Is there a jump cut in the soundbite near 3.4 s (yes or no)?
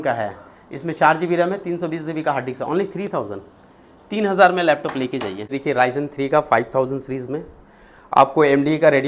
no